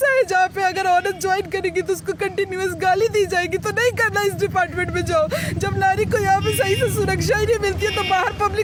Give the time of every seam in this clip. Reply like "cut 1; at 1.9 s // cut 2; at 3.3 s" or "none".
none